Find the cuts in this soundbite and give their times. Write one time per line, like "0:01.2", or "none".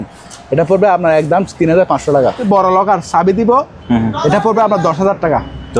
0:02.4